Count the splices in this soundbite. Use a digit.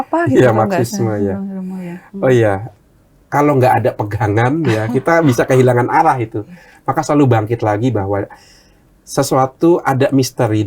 1